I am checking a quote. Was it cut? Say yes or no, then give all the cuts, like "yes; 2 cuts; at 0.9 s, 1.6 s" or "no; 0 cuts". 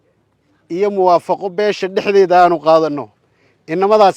no; 0 cuts